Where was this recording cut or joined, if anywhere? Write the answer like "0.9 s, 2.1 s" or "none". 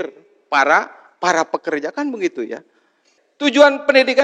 3.2 s